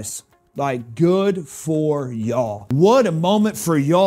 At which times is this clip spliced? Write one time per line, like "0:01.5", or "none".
0:02.6